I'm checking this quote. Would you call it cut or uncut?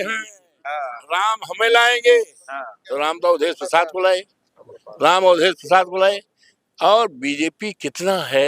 uncut